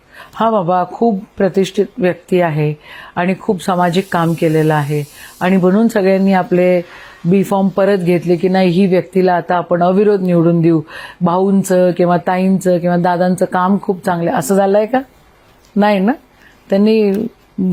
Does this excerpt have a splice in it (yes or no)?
no